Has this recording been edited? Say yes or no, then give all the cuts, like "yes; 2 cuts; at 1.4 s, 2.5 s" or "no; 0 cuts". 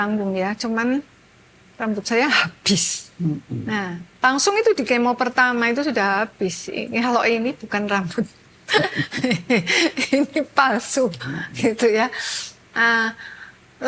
no; 0 cuts